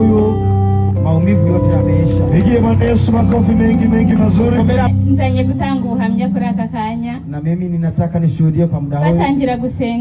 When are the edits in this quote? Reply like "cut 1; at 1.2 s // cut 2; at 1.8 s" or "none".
cut 1; at 4.9 s

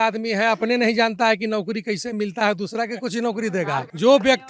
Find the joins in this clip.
none

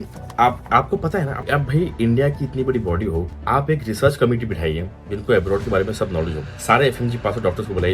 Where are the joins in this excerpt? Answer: cut 1; at 1.4 s

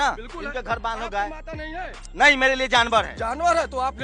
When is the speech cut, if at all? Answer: cut 1; at 3.1 s

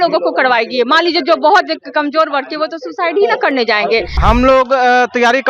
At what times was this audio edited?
cut 1; at 4.1 s

